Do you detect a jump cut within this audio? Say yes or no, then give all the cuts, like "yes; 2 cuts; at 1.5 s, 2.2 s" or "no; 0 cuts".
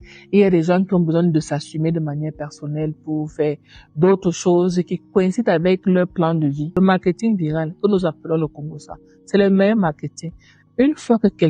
yes; 1 cut; at 6.7 s